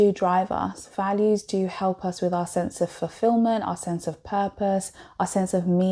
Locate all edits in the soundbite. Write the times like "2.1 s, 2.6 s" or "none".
none